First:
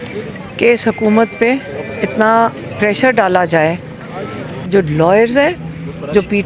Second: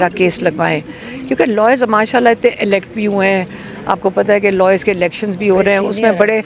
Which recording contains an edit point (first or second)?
first